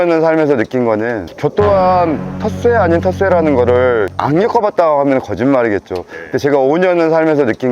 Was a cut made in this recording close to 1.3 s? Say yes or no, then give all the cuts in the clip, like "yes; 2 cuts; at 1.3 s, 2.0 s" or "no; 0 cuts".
yes; 1 cut; at 1.3 s